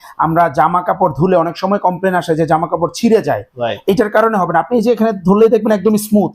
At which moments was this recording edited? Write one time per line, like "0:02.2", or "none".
none